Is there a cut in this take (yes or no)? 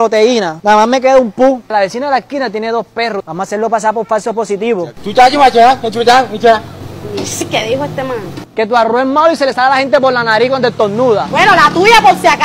yes